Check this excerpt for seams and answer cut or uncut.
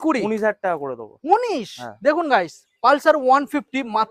uncut